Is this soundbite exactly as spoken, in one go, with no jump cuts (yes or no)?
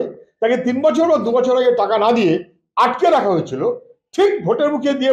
yes